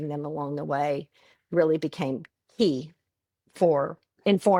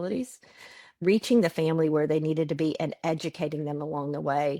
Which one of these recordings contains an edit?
second; 1 cut; at 0.9 s

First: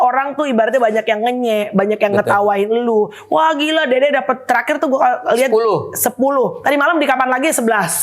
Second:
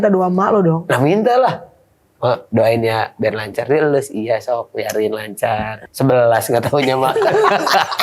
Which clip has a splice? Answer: second; 2 cuts; at 5.8 s, 7.1 s

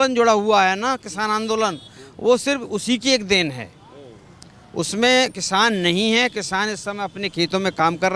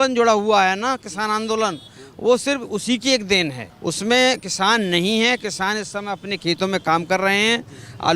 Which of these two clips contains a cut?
second; 1 cut; at 3.7 s

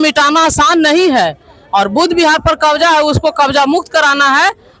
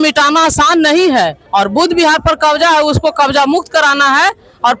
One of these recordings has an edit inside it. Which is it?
second; 1 cut; at 1.4 s

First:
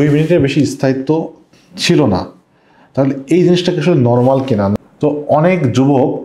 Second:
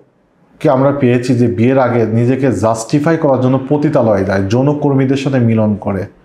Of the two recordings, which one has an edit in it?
first; 1 cut; at 4.7 s

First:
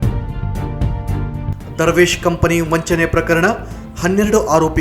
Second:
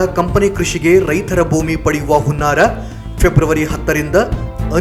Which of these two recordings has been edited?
first; 1 cut; at 1.5 s

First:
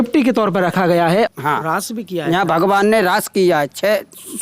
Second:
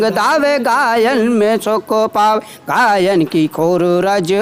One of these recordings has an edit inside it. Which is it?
first; 1 cut; at 1.3 s

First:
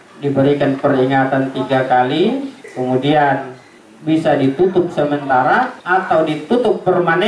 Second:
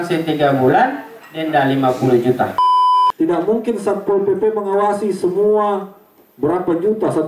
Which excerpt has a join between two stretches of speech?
second; 1 cut; at 2.7 s

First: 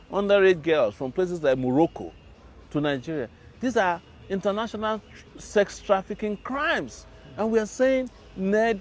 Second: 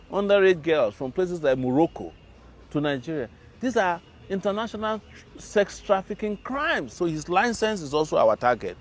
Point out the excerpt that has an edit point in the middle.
second; 1 cut; at 6.9 s

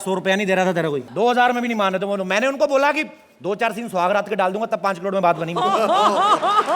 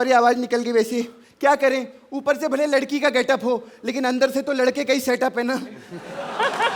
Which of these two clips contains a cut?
first; 1 cut; at 1.1 s

